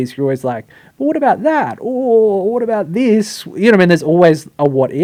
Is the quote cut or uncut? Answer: uncut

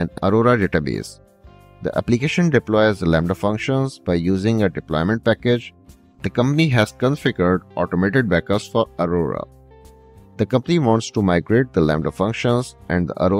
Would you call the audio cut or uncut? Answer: uncut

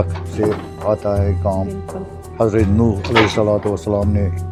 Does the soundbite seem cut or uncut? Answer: uncut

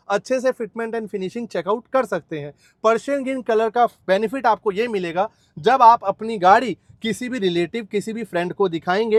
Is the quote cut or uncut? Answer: uncut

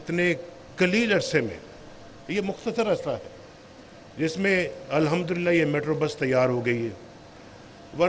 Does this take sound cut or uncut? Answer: uncut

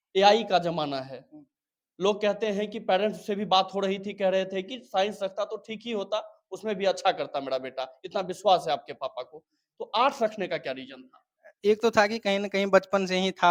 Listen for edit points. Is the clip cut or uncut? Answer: uncut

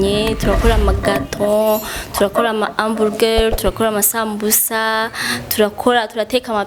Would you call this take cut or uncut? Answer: uncut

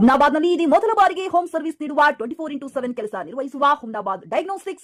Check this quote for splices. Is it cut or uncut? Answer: uncut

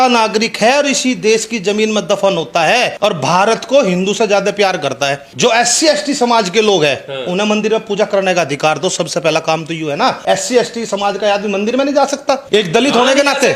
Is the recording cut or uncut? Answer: cut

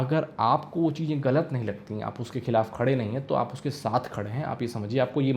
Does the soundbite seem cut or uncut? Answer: uncut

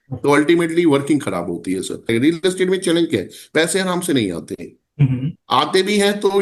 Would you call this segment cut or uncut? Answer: uncut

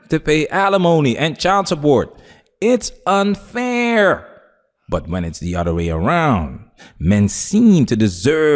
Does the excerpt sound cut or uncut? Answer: uncut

